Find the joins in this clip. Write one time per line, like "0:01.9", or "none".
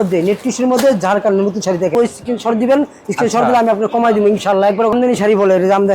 0:01.9
0:04.9